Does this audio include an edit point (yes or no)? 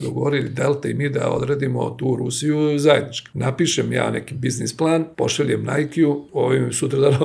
yes